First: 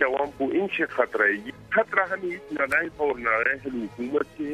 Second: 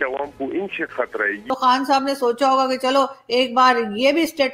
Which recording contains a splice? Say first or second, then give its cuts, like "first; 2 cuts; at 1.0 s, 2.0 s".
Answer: second; 1 cut; at 1.4 s